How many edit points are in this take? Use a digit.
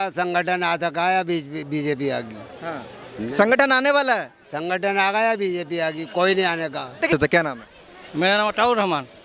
1